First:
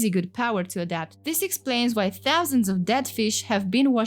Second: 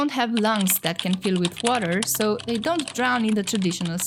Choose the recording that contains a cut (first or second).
first